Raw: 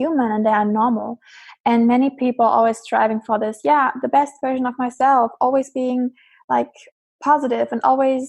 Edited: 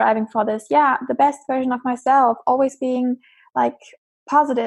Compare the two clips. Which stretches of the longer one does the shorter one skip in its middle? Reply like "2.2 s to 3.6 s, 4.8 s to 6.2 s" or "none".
none